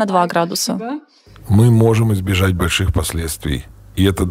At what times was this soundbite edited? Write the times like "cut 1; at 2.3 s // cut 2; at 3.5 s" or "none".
cut 1; at 1.3 s